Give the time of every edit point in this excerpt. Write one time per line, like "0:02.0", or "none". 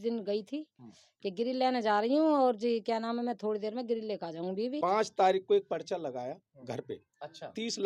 0:04.8